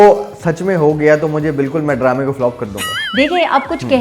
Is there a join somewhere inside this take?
no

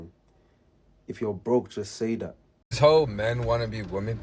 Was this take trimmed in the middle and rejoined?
yes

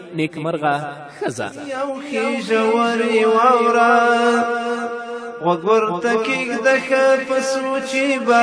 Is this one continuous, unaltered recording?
no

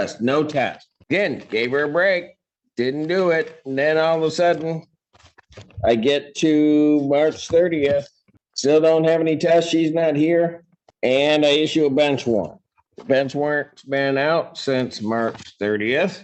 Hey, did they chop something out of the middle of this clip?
no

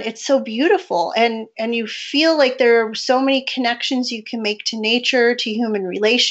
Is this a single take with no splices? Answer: yes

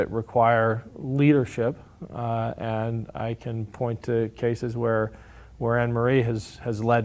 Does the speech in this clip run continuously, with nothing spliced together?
yes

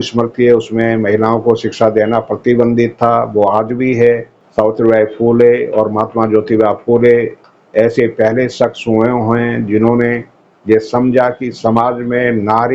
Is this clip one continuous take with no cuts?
no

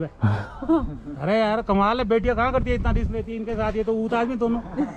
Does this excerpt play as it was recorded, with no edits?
yes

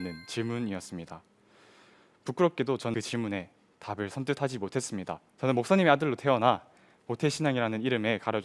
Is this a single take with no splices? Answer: no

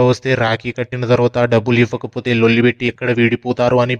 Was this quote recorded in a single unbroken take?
yes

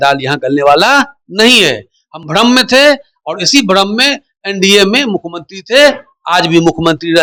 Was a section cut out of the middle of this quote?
no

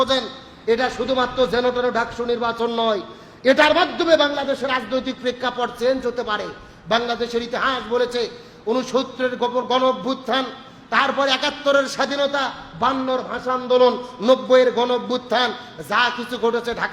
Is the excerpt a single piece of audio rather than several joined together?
yes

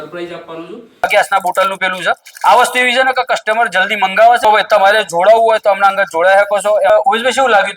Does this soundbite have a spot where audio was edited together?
yes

